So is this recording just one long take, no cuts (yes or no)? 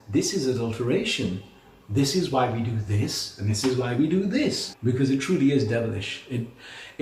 no